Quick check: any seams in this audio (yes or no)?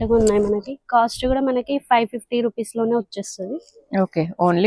no